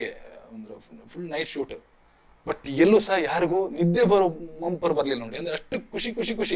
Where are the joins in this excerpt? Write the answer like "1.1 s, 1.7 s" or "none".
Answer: none